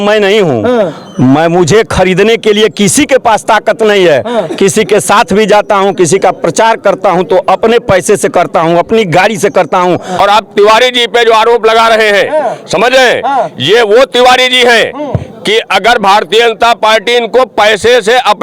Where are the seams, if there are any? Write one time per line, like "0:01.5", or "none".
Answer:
0:10.2